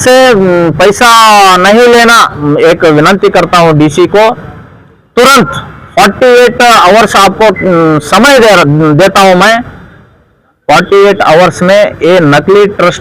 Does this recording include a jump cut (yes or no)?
yes